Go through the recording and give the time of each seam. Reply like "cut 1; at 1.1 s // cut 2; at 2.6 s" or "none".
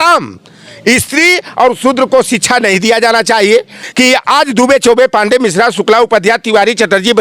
cut 1; at 3.8 s